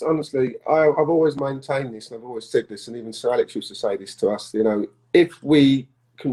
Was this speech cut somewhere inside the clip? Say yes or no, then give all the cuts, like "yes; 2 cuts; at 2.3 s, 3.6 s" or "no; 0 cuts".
no; 0 cuts